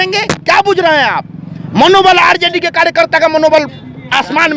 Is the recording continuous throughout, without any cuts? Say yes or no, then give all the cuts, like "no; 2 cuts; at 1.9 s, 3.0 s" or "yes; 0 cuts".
yes; 0 cuts